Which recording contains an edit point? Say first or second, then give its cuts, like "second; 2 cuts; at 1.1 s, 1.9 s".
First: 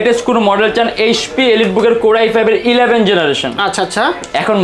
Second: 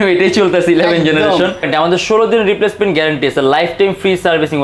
second; 1 cut; at 1.7 s